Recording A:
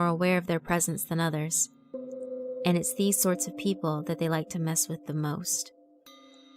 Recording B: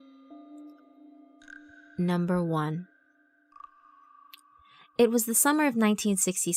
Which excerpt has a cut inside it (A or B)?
A